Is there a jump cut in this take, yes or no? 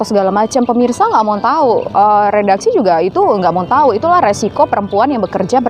no